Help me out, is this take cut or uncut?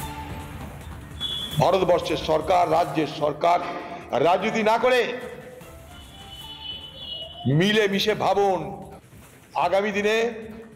cut